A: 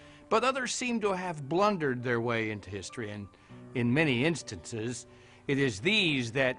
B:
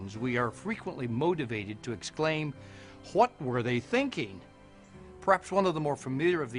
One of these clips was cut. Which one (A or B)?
B